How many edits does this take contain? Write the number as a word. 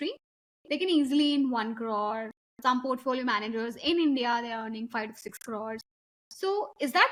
zero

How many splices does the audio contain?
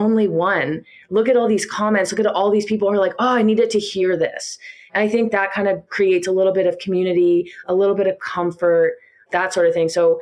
one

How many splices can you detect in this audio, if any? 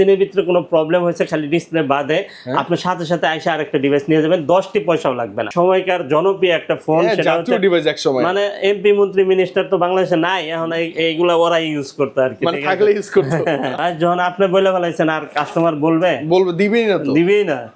two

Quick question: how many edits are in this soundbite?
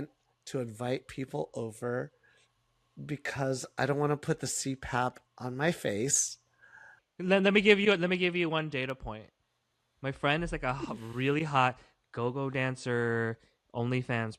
one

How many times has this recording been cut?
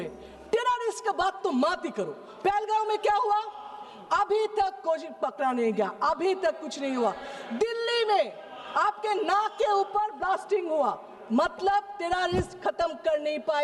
zero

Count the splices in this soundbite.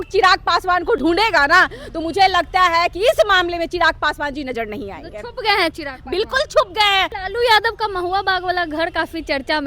two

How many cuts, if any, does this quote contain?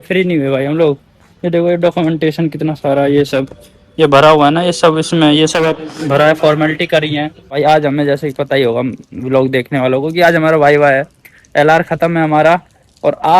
one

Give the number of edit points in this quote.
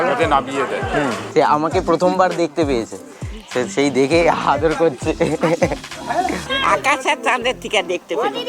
two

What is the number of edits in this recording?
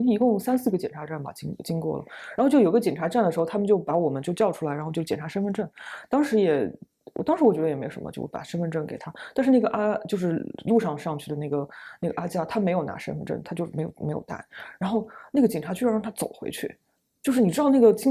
zero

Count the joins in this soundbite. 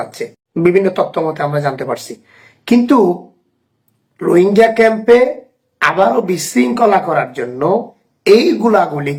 zero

